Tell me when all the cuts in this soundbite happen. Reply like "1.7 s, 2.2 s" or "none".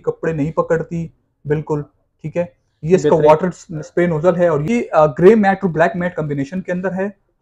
4.7 s

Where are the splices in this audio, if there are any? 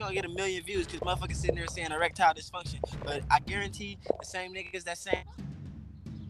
5.3 s

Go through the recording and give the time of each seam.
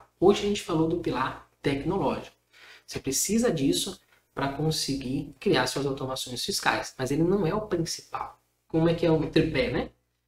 8.5 s

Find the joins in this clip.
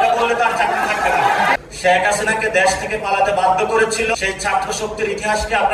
1.7 s, 4.1 s

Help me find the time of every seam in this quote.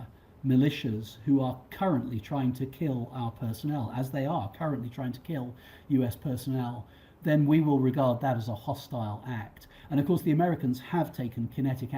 none

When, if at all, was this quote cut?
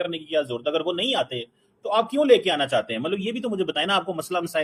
none

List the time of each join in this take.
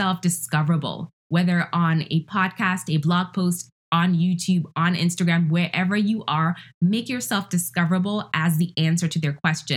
none

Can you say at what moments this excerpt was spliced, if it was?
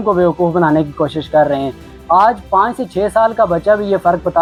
none

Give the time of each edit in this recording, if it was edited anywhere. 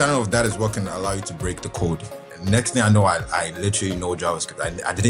2.3 s

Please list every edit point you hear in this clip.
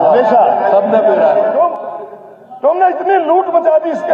1.5 s

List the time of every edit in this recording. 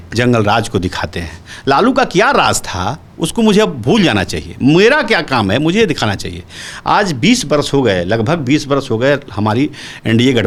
none

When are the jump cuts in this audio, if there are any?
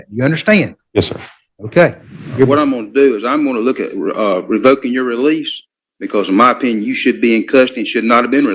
2.5 s

